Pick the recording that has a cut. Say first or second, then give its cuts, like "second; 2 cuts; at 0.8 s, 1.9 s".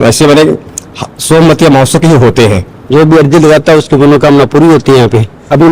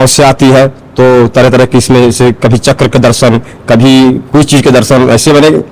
first; 1 cut; at 2.7 s